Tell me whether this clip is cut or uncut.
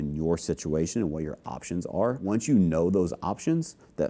cut